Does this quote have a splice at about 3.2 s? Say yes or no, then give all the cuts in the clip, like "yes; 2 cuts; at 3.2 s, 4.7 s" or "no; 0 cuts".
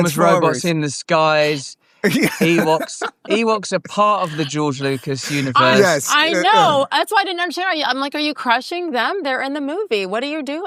no; 0 cuts